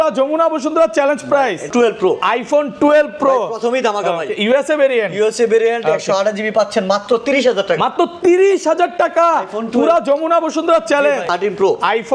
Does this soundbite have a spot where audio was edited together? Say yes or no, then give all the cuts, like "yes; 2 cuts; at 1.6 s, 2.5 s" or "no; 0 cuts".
yes; 2 cuts; at 1.7 s, 11.3 s